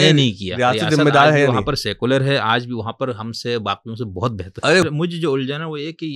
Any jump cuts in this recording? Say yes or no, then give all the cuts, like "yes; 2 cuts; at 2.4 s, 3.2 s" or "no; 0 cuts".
yes; 1 cut; at 4.8 s